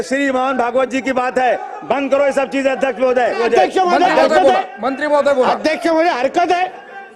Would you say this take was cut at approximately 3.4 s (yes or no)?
yes